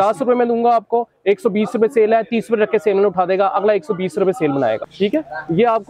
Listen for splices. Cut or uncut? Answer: cut